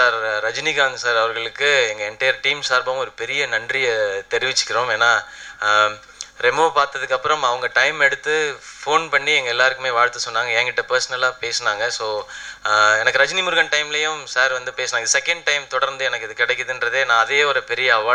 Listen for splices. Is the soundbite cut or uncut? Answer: uncut